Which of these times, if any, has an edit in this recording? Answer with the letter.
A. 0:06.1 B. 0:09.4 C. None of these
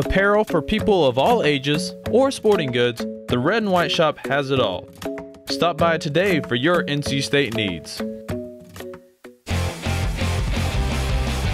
B